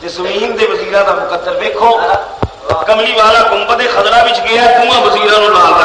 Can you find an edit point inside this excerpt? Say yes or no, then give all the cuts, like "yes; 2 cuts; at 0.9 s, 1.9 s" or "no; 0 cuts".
no; 0 cuts